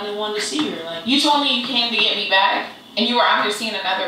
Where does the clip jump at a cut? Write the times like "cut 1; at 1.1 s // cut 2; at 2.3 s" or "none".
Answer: cut 1; at 0.9 s